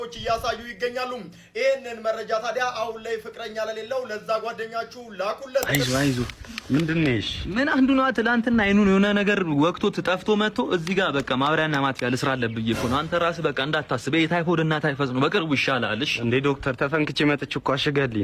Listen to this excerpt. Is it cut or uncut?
cut